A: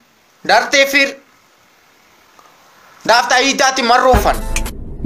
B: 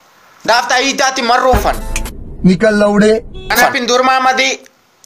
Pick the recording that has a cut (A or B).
B